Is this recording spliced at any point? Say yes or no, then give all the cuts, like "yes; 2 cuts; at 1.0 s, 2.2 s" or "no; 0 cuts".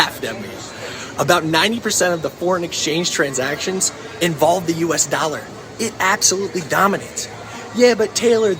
yes; 1 cut; at 5.5 s